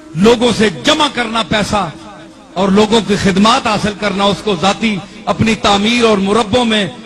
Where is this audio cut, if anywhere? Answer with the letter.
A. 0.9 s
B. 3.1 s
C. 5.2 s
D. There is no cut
D